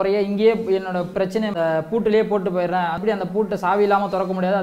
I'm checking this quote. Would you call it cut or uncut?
cut